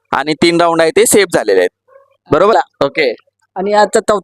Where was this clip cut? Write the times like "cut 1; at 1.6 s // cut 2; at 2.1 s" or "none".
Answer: cut 1; at 2.5 s